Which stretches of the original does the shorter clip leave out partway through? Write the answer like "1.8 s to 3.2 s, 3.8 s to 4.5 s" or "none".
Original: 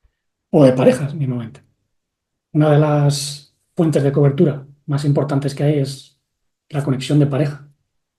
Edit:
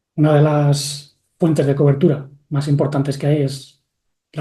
none